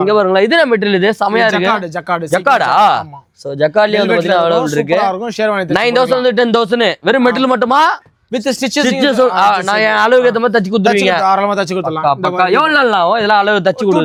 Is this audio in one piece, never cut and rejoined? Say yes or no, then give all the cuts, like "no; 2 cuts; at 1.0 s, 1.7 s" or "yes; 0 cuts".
yes; 0 cuts